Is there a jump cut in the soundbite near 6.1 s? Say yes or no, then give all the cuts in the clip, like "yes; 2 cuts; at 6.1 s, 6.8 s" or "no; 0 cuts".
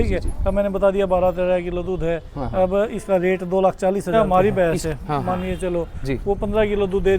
no; 1 cut; at 4.1 s